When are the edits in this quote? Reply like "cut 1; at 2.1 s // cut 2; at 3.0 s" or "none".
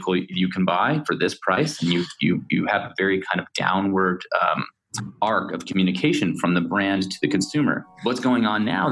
cut 1; at 7.9 s